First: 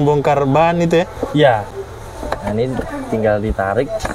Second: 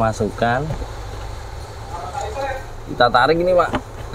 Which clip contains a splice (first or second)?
first